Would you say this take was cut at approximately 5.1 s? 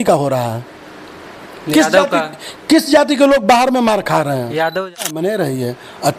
yes; 1 cut; at 5.1 s

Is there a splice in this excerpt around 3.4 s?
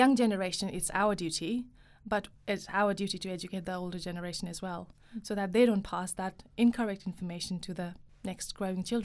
no; 1 cut; at 8.1 s

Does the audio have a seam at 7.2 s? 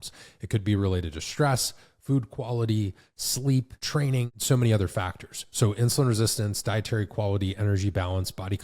no; 1 cut; at 4.3 s

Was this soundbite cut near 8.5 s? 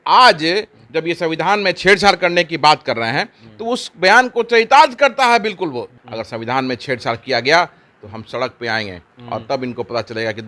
no; 1 cut; at 5.9 s

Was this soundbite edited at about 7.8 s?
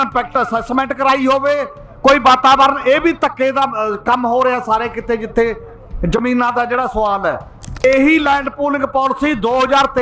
yes; 1 cut; at 7.8 s

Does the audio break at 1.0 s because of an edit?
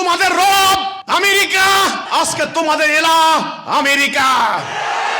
yes; 2 cuts; at 1.0 s, 2.0 s

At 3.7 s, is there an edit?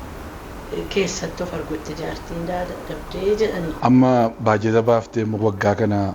yes; 1 cut; at 3.7 s

